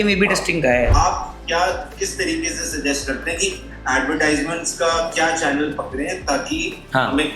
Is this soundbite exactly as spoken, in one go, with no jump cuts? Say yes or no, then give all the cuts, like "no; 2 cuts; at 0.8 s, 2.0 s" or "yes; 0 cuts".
no; 1 cut; at 0.9 s